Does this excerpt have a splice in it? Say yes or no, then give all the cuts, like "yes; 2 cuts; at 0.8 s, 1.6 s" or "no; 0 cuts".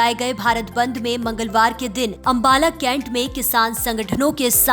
yes; 1 cut; at 2.2 s